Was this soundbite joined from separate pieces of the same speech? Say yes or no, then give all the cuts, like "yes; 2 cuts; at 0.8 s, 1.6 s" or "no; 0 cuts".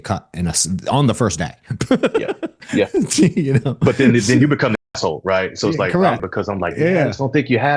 yes; 1 cut; at 6.2 s